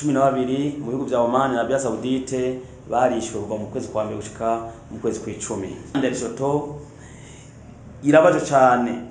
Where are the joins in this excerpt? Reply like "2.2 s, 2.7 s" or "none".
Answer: 5.9 s